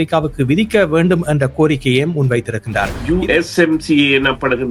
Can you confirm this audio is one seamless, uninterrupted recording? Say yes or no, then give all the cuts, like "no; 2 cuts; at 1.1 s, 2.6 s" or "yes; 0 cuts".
no; 1 cut; at 3.1 s